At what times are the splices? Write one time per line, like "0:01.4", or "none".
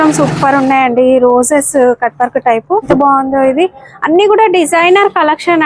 0:02.9